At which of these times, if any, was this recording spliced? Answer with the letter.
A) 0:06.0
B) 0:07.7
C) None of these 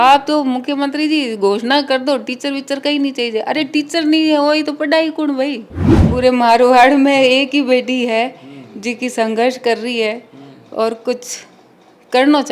A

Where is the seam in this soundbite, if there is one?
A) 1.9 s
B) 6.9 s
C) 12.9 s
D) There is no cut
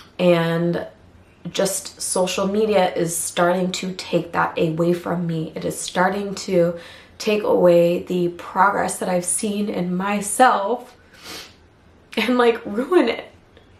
D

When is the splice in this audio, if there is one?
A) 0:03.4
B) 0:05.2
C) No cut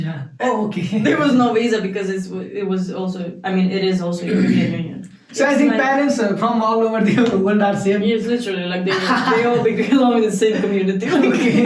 B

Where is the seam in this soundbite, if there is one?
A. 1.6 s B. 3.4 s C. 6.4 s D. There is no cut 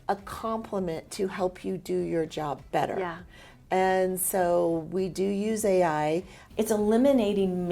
C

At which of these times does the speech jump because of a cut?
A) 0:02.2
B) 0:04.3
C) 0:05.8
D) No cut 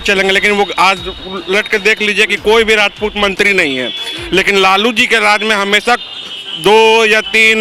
D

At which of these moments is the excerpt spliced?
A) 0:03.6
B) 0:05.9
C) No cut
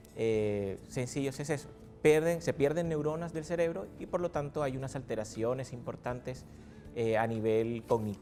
C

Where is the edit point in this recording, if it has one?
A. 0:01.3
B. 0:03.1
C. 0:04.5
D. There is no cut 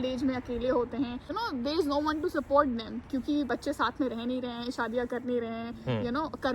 A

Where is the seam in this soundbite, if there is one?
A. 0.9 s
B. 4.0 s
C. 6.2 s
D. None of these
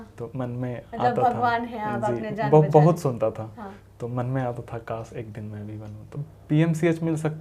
C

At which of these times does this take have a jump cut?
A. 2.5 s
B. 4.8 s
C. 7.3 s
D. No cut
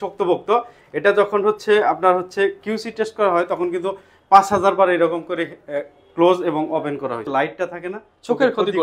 C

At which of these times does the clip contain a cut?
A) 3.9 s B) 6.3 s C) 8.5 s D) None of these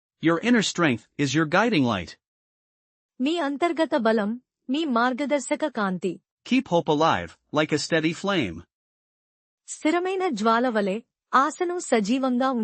B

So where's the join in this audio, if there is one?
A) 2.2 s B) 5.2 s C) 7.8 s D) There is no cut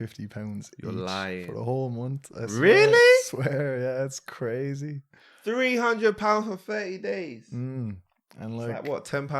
D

